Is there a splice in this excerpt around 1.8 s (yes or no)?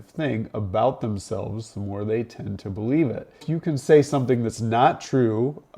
no